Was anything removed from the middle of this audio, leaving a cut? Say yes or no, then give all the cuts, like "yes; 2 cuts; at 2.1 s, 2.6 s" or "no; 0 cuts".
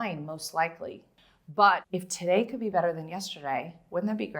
yes; 2 cuts; at 1.1 s, 1.8 s